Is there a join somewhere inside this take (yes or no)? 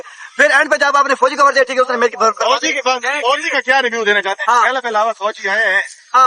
no